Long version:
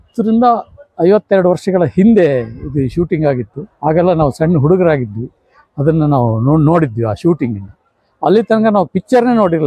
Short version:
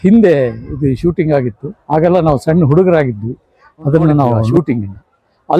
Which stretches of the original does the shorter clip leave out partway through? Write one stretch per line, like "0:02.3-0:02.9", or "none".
0:06.4-0:07.2

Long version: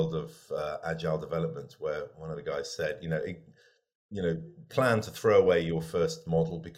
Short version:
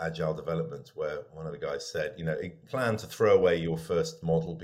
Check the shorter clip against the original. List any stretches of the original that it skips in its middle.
0:03.4-0:04.6

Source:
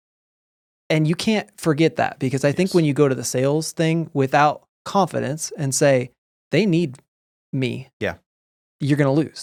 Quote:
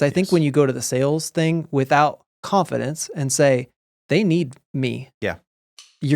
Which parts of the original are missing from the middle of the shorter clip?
0:07.0-0:07.4

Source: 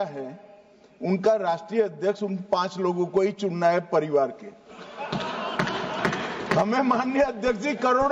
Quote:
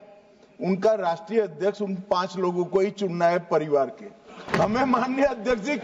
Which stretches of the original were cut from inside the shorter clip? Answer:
0:04.8-0:06.3

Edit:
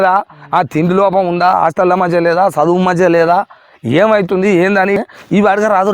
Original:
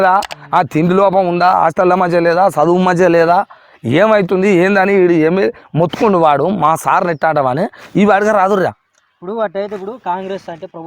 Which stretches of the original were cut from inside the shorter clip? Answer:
0:05.0-0:07.6

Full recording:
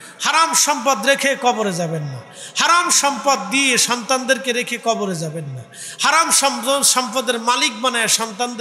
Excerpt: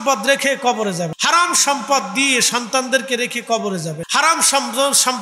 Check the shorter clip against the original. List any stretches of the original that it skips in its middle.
0:01.9-0:02.5
0:05.4-0:05.9

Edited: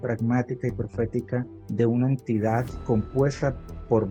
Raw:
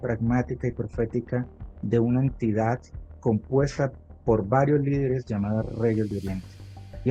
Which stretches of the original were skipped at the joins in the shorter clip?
0:01.6-0:01.7
0:02.9-0:03.1

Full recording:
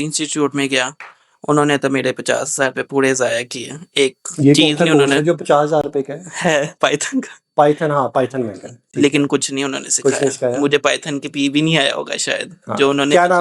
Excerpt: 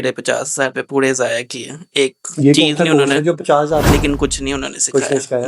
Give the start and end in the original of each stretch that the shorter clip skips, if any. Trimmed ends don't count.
0:05.9-0:09.0

